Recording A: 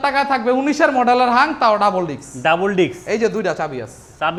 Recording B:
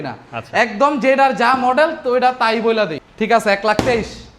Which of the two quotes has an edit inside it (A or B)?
B